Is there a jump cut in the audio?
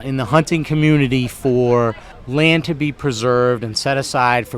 yes; 1 cut; at 2.1 s

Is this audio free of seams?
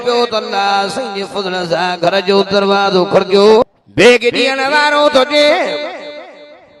no; 1 cut; at 3.6 s

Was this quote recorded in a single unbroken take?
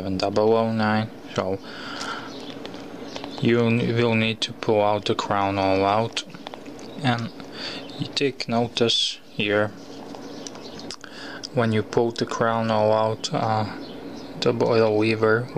yes; 0 cuts

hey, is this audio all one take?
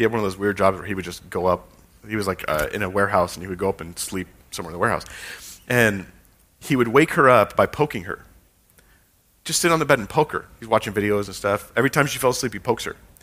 yes; 0 cuts

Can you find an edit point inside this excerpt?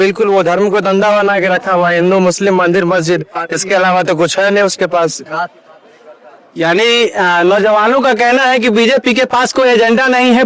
no; 0 cuts

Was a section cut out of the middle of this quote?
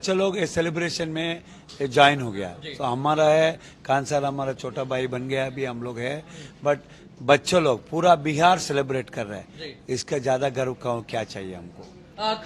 no; 0 cuts

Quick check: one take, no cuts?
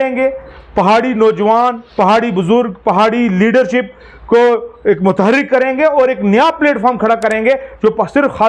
yes; 0 cuts

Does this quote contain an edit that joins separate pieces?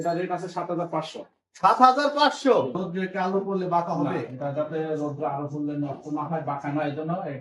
yes; 1 cut; at 2.8 s

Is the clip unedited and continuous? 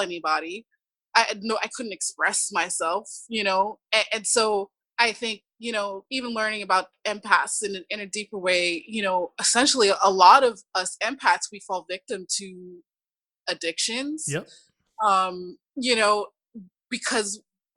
no; 1 cut; at 4.8 s

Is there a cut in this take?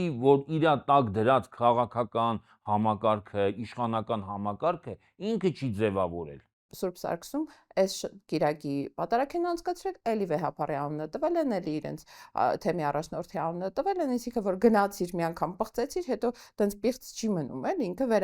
yes; 1 cut; at 6.7 s

